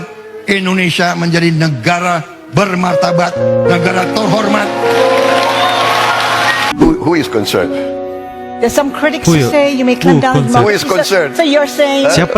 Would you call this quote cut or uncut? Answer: cut